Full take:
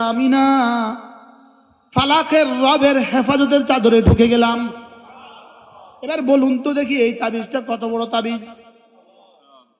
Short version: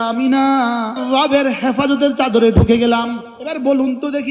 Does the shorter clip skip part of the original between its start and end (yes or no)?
yes